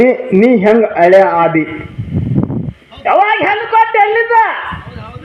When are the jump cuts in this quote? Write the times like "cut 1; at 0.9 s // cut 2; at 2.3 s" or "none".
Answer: none